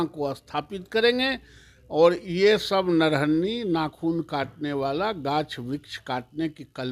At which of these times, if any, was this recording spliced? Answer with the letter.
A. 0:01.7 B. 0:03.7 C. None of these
C